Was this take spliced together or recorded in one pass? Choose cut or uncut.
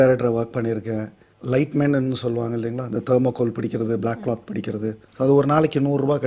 cut